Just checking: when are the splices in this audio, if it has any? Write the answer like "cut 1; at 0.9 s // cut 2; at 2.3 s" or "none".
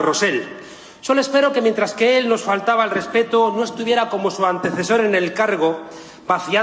cut 1; at 2.8 s